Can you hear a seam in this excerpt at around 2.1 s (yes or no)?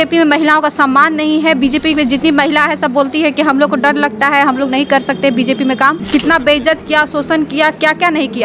no